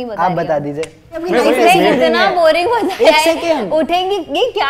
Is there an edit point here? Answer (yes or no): yes